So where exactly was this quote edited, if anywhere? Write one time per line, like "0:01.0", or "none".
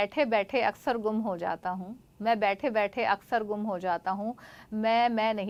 none